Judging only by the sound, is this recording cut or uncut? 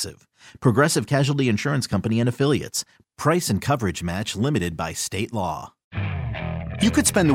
cut